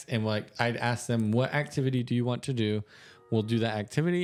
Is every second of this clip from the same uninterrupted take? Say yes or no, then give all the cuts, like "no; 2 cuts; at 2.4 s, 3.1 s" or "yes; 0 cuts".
yes; 0 cuts